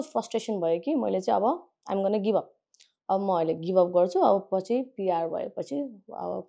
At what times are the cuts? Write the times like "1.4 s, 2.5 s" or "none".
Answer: none